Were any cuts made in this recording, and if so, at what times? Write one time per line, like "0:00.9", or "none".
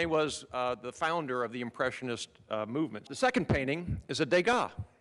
0:03.0